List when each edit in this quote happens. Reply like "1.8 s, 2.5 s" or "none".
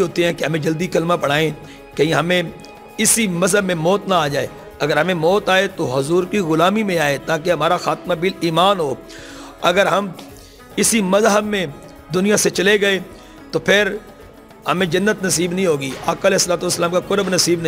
none